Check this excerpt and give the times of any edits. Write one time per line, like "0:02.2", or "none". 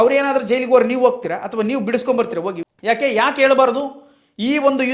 0:02.6